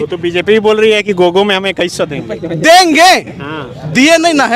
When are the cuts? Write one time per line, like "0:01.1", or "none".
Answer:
none